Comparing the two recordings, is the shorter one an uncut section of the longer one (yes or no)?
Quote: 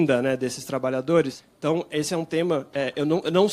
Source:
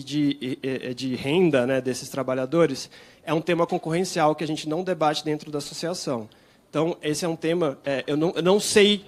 no